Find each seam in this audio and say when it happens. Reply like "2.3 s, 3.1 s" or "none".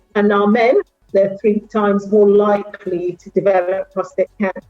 1.0 s